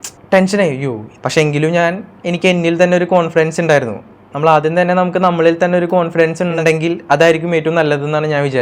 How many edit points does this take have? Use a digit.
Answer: 2